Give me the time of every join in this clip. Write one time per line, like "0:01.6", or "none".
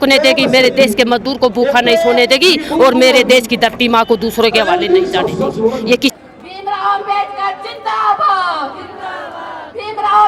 0:06.1